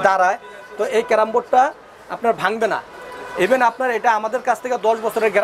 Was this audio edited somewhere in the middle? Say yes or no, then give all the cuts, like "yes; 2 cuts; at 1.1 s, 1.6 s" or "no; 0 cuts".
no; 0 cuts